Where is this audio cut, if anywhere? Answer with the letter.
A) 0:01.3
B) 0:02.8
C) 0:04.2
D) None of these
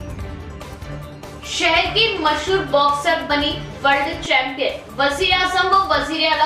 A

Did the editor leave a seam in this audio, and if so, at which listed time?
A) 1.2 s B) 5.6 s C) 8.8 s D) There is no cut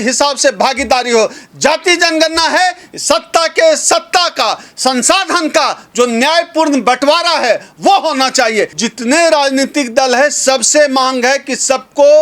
C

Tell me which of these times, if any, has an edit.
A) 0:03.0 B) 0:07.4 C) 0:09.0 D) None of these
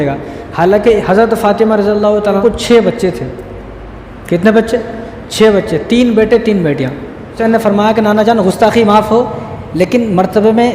B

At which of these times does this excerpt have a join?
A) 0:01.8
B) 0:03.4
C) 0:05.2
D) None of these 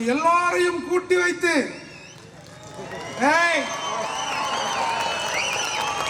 D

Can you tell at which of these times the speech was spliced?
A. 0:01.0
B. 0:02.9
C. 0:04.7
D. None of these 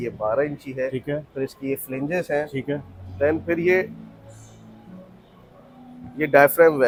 D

